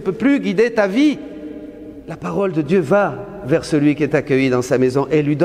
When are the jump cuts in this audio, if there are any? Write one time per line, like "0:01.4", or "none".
0:02.2